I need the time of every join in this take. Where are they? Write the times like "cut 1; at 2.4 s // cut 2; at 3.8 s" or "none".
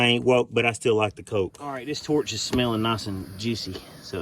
cut 1; at 1.9 s